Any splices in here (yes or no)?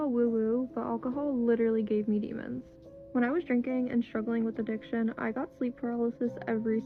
no